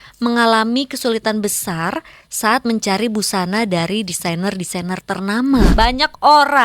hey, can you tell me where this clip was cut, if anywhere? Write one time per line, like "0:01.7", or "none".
0:05.7